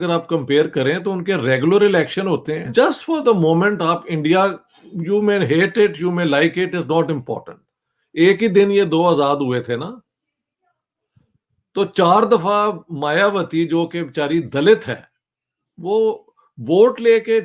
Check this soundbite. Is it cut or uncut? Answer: cut